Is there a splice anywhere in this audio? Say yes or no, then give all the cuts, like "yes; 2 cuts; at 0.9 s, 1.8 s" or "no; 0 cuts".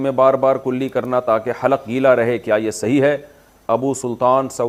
no; 0 cuts